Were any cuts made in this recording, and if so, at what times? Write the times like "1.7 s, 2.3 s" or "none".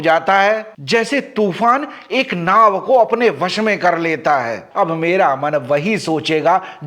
4.6 s